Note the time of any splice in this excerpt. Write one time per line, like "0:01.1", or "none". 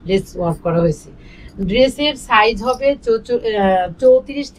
none